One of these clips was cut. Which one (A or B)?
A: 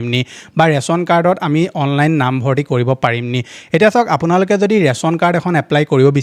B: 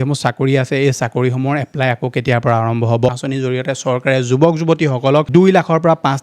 B